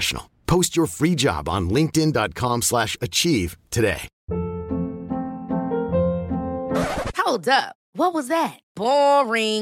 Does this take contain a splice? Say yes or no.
yes